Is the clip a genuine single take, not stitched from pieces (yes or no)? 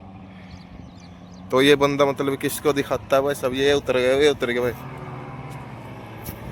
yes